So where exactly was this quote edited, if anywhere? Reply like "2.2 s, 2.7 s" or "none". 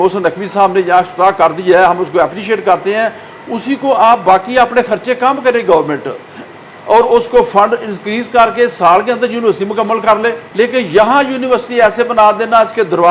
10.4 s